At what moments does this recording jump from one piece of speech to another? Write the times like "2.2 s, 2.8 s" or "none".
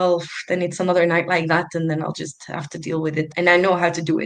3.3 s